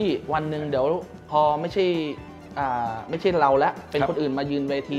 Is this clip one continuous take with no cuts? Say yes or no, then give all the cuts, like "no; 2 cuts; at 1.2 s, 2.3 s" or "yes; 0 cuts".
yes; 0 cuts